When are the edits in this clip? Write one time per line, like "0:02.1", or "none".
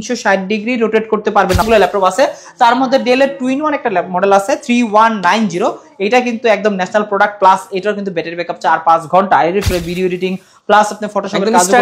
0:01.6
0:09.7